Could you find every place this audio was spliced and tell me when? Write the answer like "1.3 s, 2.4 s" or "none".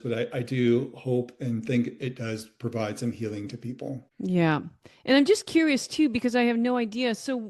4.1 s